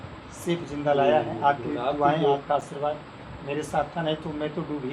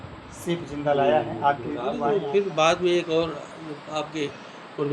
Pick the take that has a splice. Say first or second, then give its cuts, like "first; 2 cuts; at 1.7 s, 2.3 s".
second; 1 cut; at 2.0 s